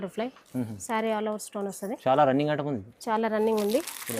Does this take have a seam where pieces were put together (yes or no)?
no